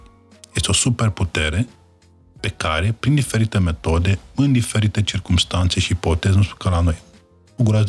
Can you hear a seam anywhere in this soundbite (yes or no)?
no